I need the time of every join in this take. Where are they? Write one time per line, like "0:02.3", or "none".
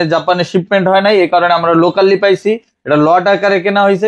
none